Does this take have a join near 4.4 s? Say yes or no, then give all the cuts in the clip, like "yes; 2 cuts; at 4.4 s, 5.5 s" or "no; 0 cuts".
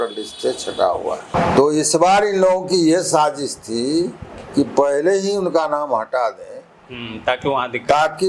no; 1 cut; at 1.3 s